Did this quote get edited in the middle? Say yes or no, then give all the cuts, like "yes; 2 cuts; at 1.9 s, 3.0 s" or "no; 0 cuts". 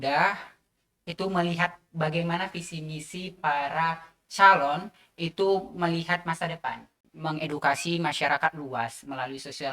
yes; 1 cut; at 7.0 s